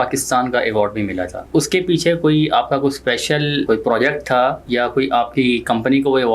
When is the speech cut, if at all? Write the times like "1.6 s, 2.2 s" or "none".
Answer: 1.4 s, 3.6 s, 4.6 s